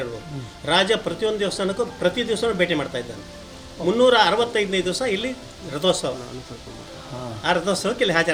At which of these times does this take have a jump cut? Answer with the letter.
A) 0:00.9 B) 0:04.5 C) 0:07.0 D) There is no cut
D